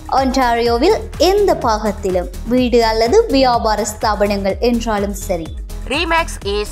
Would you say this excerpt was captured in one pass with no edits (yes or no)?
yes